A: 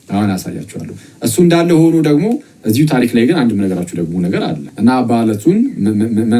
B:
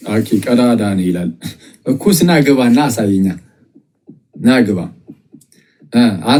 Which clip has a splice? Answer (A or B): A